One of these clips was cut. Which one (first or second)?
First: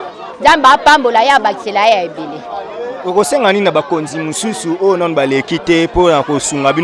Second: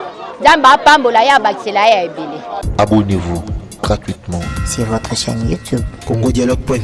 second